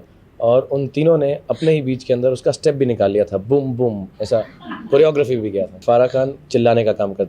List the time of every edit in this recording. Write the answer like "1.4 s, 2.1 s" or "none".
5.8 s